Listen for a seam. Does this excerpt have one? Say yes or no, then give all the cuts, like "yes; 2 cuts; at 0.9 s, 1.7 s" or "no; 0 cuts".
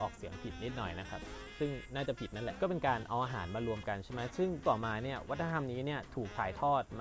yes; 2 cuts; at 2.6 s, 4.6 s